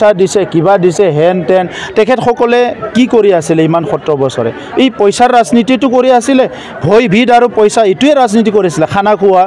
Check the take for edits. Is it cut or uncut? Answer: uncut